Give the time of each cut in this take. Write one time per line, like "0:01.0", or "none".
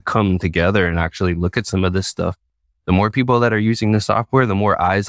none